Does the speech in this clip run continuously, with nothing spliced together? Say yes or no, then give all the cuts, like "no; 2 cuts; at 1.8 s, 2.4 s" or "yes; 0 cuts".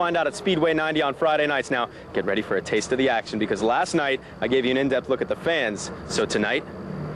yes; 0 cuts